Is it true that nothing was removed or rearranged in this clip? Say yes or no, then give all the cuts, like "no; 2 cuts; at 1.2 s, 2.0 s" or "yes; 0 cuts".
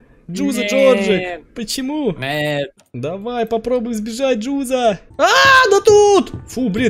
no; 2 cuts; at 2.8 s, 5.1 s